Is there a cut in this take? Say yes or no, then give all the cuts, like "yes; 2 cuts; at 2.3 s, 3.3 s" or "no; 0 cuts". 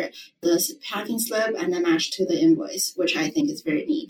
no; 0 cuts